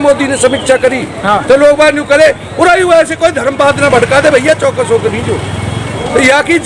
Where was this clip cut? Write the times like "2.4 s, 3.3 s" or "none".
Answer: none